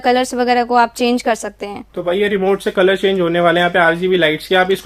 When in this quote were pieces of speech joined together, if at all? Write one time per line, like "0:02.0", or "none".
none

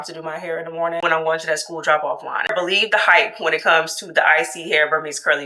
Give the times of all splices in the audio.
0:01.0
0:02.5

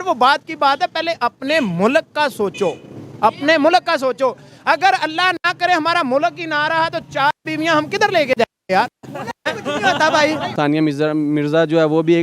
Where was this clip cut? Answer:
0:10.5

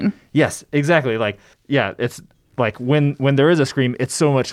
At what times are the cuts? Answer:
0:01.5

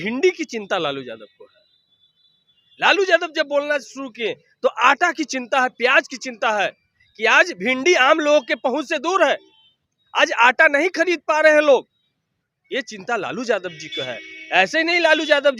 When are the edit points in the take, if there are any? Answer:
none

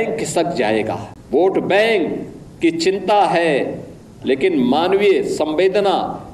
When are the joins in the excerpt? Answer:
0:01.1

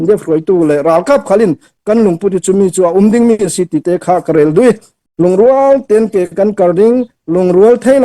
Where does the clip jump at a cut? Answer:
0:05.0

